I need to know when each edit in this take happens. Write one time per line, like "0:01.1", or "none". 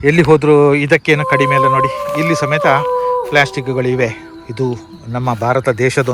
none

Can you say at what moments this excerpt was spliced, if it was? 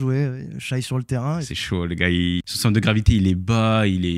0:01.5
0:02.4

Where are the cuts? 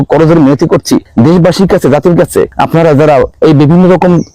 0:01.1
0:02.5
0:03.3

